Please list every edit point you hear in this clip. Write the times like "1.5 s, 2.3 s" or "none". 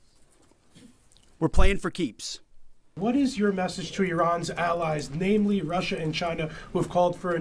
2.9 s